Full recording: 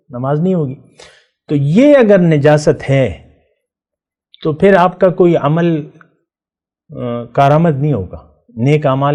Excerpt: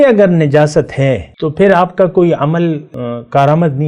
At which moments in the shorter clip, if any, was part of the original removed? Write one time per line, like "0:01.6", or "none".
0:01.4
0:02.9